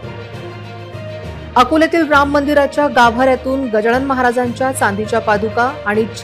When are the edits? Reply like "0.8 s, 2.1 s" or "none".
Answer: 1.5 s

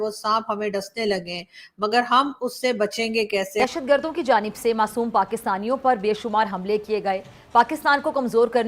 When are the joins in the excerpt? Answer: 3.6 s

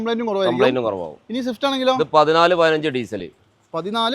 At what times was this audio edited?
none

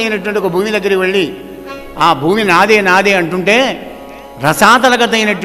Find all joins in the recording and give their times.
none

